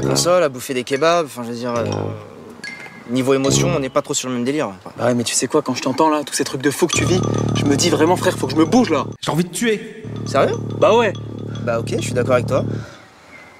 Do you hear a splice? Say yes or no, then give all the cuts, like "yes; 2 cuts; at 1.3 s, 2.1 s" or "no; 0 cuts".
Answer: no; 0 cuts